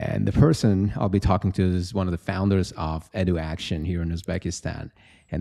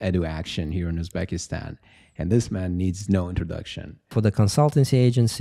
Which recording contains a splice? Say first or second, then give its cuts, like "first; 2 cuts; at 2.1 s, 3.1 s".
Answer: second; 1 cut; at 4.1 s